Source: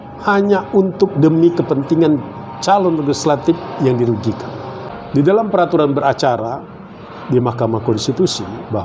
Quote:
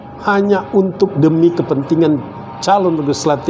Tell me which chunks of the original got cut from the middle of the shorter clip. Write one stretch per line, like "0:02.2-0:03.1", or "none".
none